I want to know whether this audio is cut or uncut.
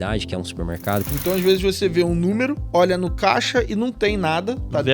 cut